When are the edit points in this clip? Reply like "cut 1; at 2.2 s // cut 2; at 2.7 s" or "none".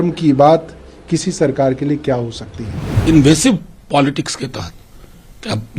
cut 1; at 3.0 s